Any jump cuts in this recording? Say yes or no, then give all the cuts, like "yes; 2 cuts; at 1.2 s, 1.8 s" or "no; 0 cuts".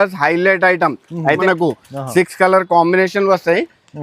yes; 1 cut; at 1.4 s